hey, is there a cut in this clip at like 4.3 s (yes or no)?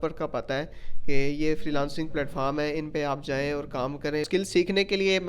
yes